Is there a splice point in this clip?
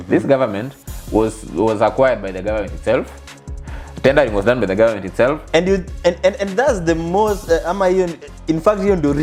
no; 0 cuts

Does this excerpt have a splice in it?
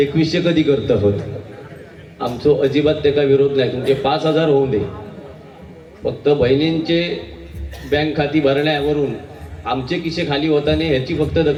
no; 0 cuts

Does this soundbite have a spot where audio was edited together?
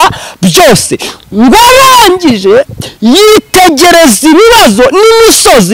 no; 0 cuts

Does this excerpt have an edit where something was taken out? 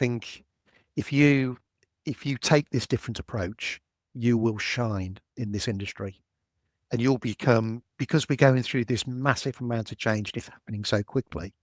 no; 0 cuts

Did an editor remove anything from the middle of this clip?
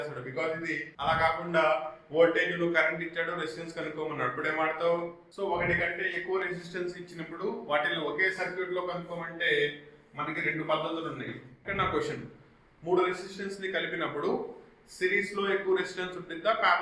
yes; 3 cuts; at 0.9 s, 5.2 s, 11.6 s

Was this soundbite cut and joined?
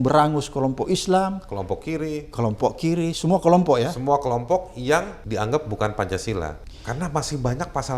yes; 2 cuts; at 5.2 s, 6.7 s

